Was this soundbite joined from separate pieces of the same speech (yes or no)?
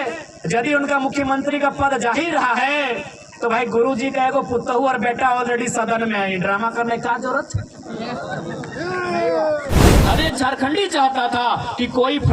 yes